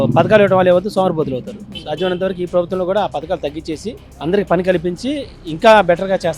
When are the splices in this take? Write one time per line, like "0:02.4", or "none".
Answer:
none